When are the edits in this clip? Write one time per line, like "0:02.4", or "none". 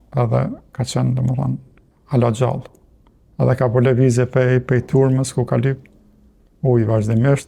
none